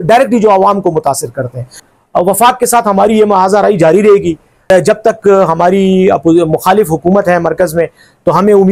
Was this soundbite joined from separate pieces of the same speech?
yes; 2 cuts; at 1.8 s, 4.7 s

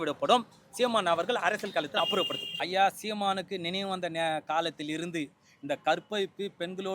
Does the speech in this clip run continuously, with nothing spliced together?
no; 1 cut; at 2.4 s

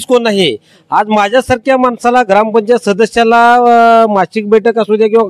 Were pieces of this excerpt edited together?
no; 0 cuts

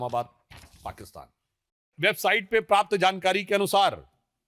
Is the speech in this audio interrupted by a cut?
yes; 1 cut; at 1.9 s

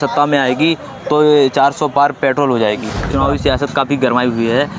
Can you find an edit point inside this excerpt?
yes; 1 cut; at 3.0 s

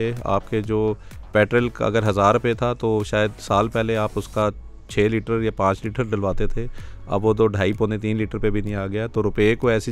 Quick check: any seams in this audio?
no; 0 cuts

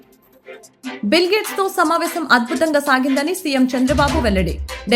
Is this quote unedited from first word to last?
no; 1 cut; at 1.0 s

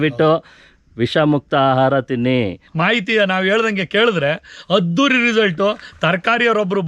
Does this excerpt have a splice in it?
yes; 1 cut; at 2.6 s

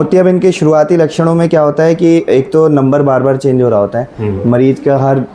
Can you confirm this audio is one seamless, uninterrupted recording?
yes; 0 cuts

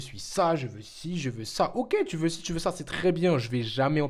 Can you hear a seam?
no; 0 cuts

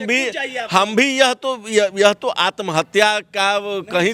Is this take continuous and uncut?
yes; 0 cuts

